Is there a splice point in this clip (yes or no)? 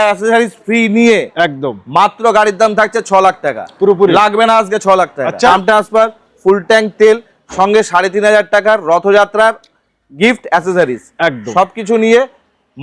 yes